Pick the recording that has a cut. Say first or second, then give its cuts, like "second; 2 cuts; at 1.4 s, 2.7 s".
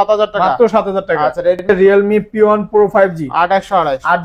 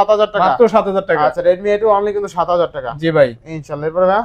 first; 1 cut; at 1.7 s